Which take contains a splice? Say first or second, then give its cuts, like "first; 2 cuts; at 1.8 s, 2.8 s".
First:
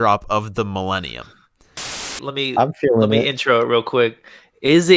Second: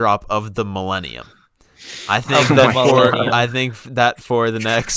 first; 1 cut; at 2.0 s